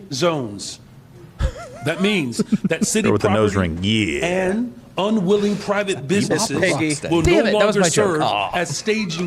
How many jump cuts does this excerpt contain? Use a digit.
0